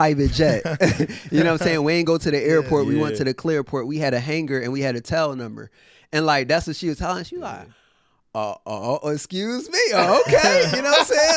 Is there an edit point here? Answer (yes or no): no